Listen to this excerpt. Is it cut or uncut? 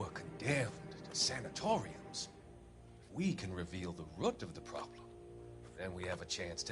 uncut